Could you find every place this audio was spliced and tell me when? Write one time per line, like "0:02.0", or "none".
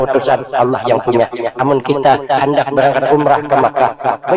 none